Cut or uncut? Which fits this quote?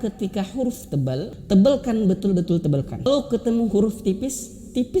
cut